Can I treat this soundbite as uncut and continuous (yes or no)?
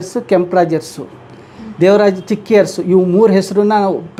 yes